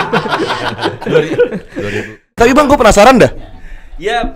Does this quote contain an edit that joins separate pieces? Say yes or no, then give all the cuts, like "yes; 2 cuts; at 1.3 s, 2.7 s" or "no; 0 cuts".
yes; 1 cut; at 2.3 s